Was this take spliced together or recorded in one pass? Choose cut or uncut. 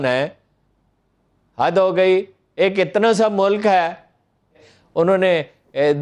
cut